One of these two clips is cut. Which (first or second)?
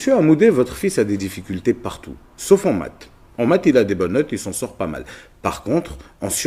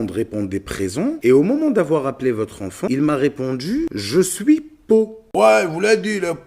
second